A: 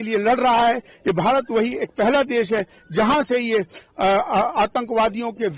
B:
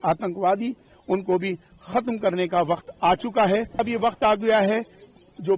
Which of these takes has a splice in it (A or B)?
B